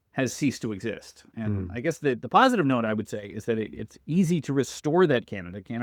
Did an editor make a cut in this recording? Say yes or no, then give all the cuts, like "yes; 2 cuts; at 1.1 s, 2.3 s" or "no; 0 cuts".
no; 0 cuts